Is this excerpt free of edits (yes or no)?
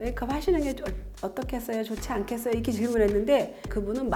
yes